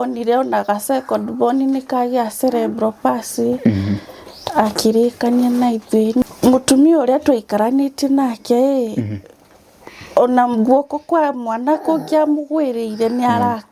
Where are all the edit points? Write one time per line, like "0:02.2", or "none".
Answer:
0:06.2